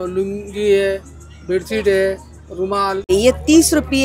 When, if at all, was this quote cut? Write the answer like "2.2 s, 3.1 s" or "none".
3.1 s